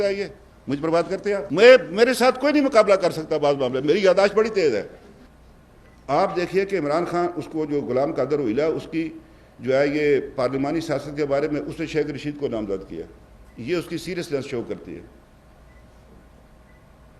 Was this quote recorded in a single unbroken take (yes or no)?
yes